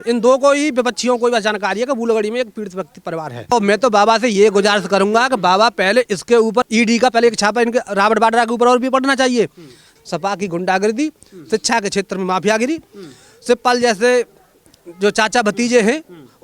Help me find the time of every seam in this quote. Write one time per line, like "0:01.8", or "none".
0:03.5
0:09.9